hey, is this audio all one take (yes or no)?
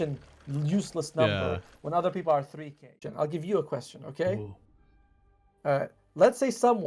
no